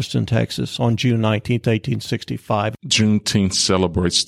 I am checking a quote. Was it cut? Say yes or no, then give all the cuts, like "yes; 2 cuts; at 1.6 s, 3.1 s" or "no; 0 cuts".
yes; 1 cut; at 2.7 s